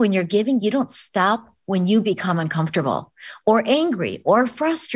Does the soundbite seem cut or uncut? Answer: uncut